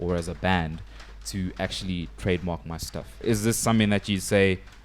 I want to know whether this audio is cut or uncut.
cut